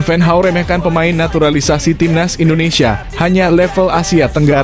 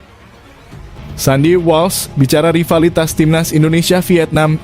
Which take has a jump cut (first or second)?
second